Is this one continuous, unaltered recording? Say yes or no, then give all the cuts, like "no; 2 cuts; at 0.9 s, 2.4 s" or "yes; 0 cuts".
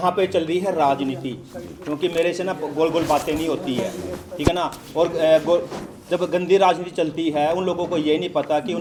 yes; 0 cuts